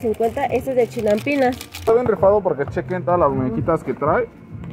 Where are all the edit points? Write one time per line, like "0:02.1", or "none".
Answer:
0:01.8